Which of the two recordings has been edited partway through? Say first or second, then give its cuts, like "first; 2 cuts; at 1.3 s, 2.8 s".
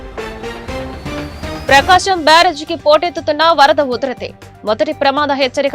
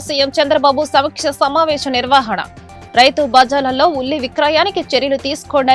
first; 1 cut; at 1.4 s